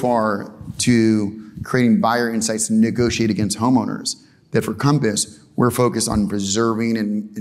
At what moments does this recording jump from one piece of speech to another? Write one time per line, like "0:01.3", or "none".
none